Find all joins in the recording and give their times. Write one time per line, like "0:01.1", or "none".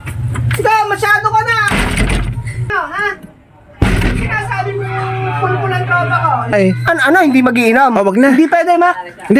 0:06.5